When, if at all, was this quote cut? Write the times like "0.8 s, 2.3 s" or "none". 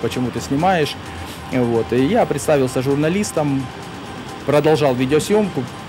none